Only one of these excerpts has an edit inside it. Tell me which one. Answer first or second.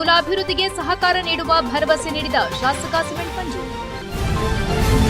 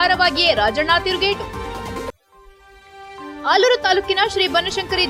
first